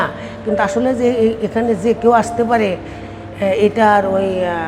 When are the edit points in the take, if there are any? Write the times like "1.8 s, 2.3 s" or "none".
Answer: none

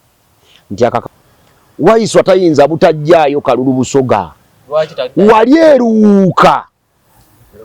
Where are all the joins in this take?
1.1 s

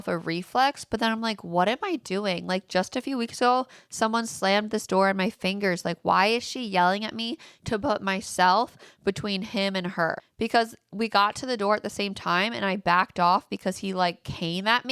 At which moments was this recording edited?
10.2 s

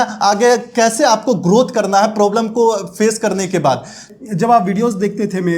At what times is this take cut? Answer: 4.0 s

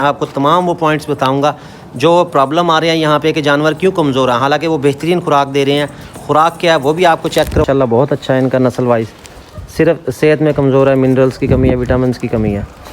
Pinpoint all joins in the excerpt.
7.6 s

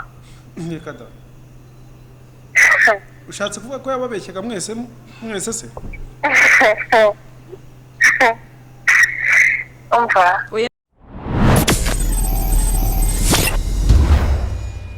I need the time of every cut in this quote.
10.8 s

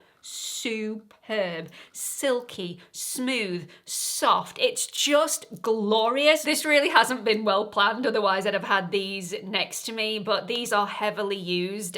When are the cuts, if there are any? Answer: none

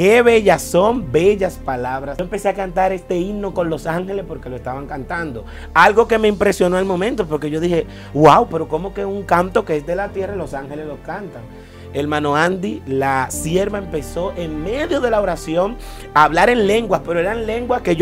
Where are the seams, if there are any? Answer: 2.2 s

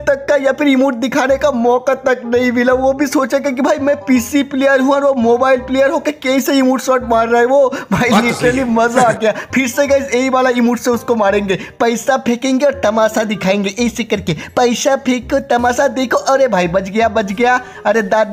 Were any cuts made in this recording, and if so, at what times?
none

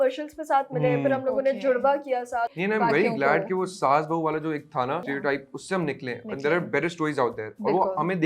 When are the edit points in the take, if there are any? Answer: 2.5 s, 5.0 s

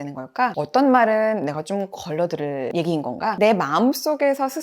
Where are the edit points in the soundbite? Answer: 3.4 s

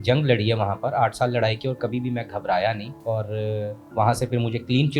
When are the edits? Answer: 2.9 s

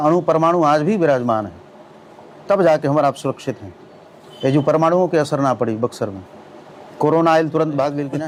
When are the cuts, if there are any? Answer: none

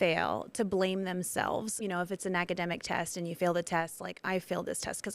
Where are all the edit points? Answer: 1.7 s

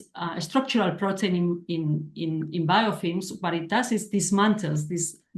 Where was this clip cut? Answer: none

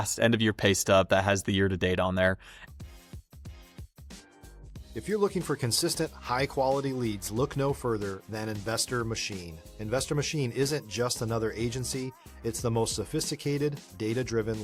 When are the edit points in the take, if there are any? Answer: none

